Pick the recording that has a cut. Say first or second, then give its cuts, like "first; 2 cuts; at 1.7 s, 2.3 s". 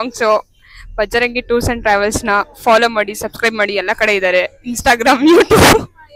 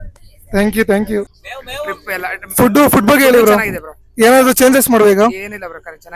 second; 1 cut; at 1.3 s